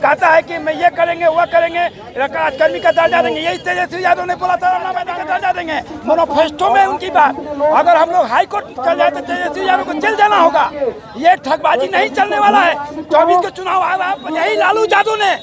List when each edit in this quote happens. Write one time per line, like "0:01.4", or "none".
0:05.1
0:14.2